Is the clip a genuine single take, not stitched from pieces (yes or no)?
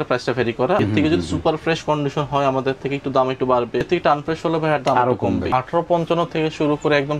no